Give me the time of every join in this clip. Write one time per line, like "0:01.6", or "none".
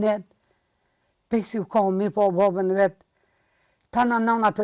none